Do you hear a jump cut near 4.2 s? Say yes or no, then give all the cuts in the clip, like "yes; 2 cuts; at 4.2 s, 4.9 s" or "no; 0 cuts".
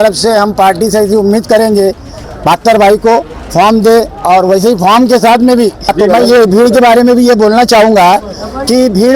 no; 2 cuts; at 2.2 s, 6.0 s